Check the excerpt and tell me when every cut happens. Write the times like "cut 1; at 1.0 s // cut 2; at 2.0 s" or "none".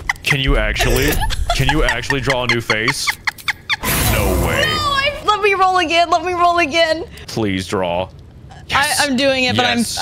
cut 1; at 3.8 s // cut 2; at 5.2 s // cut 3; at 7.2 s